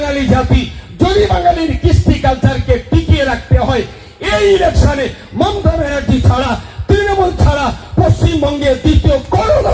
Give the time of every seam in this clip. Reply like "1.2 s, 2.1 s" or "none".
none